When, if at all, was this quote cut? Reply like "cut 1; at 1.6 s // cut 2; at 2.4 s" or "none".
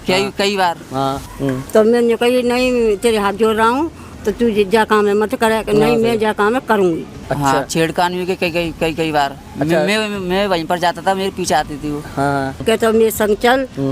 cut 1; at 1.3 s // cut 2; at 7.2 s // cut 3; at 12.6 s